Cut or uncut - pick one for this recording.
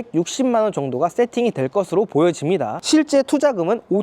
cut